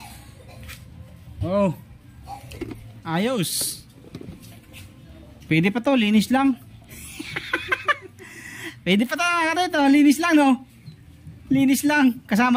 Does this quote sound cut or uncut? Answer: uncut